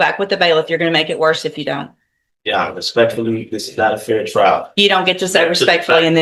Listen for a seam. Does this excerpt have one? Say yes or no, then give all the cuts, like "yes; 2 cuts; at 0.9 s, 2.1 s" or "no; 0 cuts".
no; 0 cuts